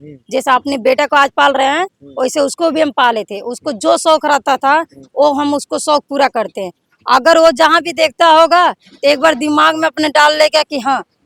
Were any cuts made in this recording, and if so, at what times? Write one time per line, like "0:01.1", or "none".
none